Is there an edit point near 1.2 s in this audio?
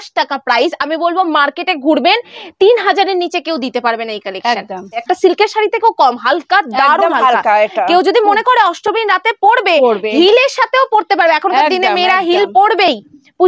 no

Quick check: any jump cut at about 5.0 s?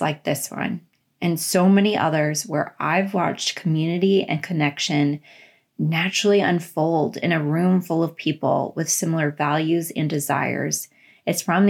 no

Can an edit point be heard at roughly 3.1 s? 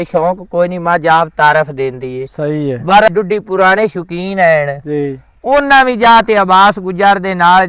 yes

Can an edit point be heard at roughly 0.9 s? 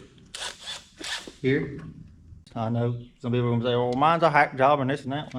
no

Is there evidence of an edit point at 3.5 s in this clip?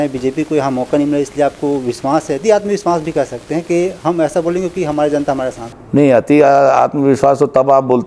no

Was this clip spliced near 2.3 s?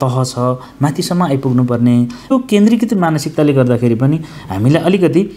yes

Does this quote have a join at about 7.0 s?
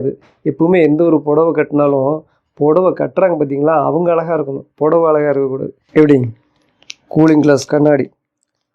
no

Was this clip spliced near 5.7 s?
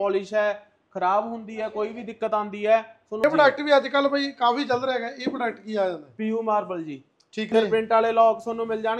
no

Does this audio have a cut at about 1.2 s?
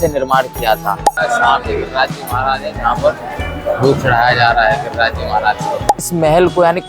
yes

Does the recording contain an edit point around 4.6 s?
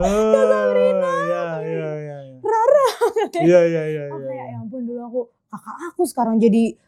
no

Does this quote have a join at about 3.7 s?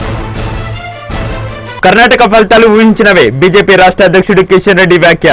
no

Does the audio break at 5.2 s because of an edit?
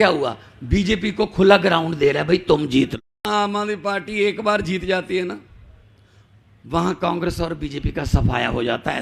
no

